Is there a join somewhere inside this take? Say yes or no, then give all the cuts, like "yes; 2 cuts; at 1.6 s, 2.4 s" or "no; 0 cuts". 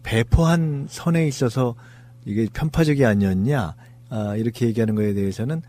no; 0 cuts